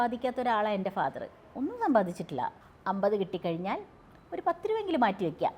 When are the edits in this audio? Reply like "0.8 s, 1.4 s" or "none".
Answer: 2.6 s